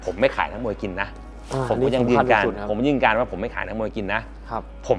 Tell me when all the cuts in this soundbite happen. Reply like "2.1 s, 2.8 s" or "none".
none